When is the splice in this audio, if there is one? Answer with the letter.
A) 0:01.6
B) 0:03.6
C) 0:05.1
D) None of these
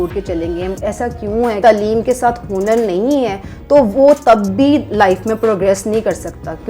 A